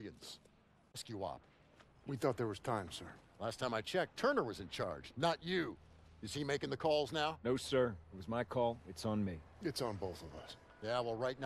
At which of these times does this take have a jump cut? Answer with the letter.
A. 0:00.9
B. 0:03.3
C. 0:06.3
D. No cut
A